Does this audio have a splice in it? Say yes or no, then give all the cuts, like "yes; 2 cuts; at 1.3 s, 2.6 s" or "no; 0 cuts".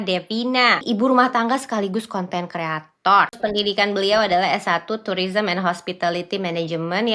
yes; 2 cuts; at 0.8 s, 3.4 s